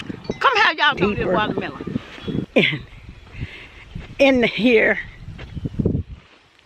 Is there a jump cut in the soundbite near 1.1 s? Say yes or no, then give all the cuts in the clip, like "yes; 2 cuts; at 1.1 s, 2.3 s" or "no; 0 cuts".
no; 1 cut; at 2.4 s